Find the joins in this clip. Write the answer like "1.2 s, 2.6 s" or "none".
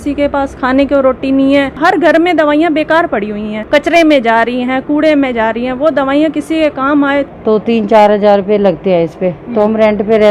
1.7 s, 3.5 s, 7.3 s